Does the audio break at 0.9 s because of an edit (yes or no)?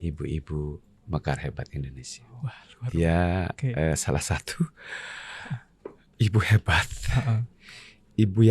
no